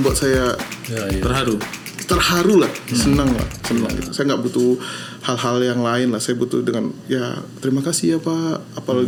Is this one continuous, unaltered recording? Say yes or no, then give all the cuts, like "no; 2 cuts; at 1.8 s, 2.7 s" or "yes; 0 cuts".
yes; 0 cuts